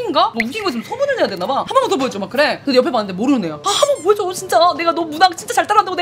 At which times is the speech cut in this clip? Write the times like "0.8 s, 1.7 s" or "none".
1.6 s